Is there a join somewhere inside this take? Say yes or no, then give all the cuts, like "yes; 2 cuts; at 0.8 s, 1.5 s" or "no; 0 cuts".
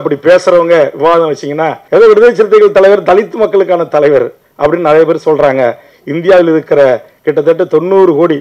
yes; 1 cut; at 1.8 s